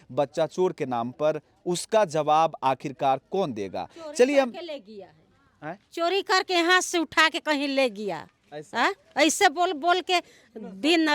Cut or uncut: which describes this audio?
uncut